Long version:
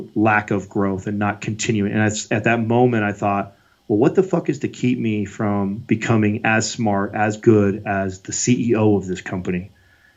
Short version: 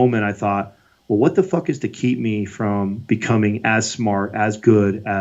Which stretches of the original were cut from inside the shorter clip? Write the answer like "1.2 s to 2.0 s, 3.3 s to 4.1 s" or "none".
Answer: none